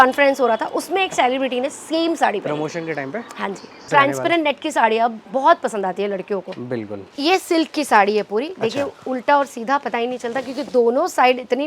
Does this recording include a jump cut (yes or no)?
yes